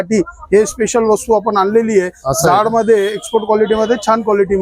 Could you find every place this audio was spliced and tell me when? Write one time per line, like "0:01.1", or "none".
none